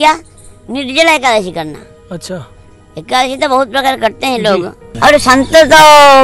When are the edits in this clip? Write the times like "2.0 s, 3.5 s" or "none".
4.8 s